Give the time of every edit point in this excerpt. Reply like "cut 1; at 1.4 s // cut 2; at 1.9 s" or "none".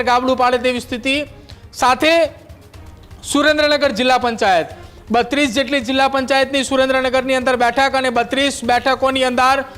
none